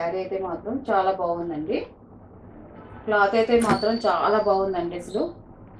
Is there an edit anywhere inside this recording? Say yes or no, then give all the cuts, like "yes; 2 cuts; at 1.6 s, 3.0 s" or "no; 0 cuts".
no; 0 cuts